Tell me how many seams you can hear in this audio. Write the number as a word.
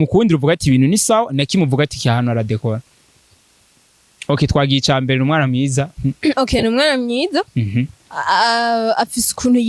zero